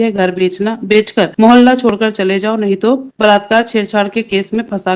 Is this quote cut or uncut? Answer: cut